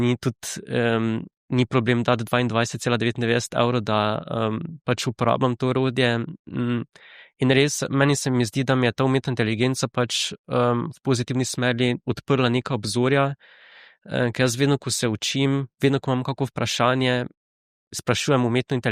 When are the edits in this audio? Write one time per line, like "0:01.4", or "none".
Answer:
none